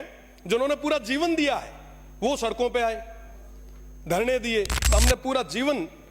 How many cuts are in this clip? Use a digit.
1